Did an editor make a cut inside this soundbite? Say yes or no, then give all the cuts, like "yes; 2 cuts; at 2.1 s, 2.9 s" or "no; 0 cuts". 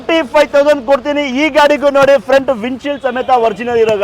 no; 0 cuts